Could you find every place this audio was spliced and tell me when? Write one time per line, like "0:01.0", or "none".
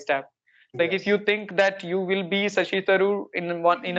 none